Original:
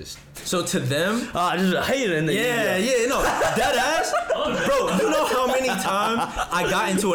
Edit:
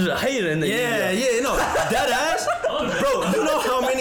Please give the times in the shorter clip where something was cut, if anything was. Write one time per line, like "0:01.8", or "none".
none